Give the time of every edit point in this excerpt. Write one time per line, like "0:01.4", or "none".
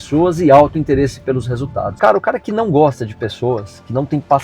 0:01.9